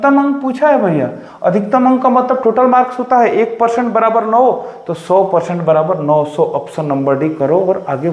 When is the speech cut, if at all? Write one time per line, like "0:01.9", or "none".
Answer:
none